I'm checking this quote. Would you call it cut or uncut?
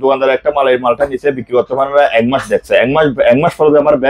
uncut